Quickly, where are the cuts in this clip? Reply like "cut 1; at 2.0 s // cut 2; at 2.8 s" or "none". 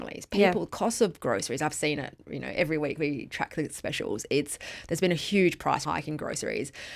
cut 1; at 5.8 s